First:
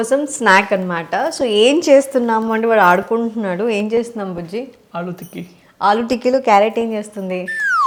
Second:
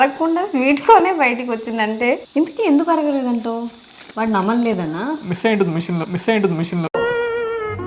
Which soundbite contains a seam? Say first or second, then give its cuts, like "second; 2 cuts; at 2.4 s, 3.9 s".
second; 1 cut; at 2.2 s